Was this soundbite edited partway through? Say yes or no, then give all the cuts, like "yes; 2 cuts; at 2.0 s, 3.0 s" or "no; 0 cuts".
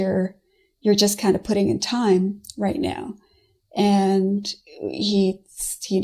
no; 0 cuts